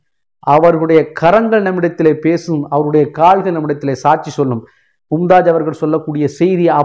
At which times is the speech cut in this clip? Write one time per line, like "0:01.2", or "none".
none